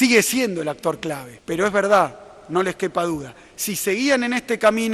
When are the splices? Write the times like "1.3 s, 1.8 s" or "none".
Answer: 1.3 s